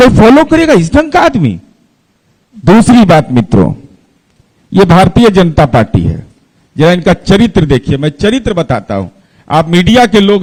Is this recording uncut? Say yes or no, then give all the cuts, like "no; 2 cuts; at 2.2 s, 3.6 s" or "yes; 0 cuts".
yes; 0 cuts